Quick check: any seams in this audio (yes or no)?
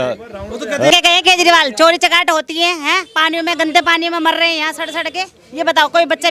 yes